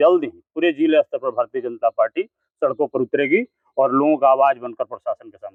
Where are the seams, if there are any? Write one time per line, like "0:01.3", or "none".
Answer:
none